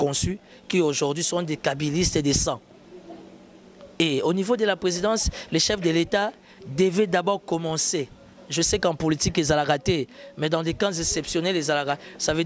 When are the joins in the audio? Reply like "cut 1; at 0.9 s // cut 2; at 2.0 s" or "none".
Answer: none